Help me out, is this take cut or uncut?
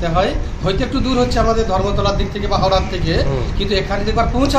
uncut